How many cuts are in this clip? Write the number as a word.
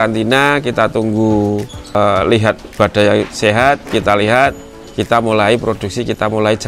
one